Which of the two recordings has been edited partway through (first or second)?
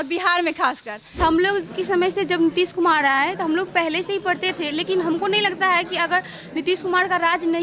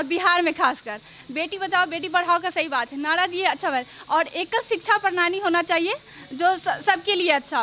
first